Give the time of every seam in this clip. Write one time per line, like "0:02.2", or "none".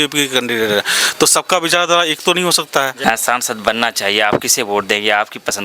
0:02.9